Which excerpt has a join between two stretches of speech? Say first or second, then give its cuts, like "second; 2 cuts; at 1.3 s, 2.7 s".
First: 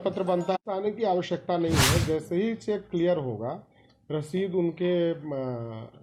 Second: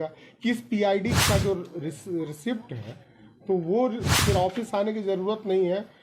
second; 2 cuts; at 1.1 s, 4.1 s